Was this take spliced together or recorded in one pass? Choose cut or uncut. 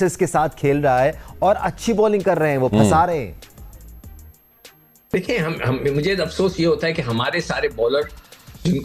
uncut